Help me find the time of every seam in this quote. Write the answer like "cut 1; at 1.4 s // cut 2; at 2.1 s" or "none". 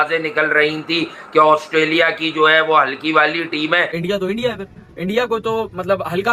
cut 1; at 3.9 s